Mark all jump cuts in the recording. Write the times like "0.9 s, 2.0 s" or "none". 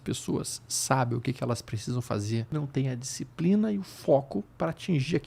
2.5 s